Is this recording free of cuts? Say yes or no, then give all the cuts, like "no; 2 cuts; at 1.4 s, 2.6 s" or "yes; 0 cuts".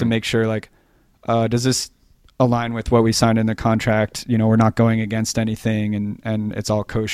yes; 0 cuts